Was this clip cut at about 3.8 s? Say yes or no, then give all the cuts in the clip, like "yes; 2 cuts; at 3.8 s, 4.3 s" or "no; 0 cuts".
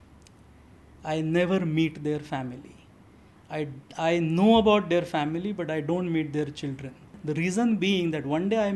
no; 1 cut; at 7.1 s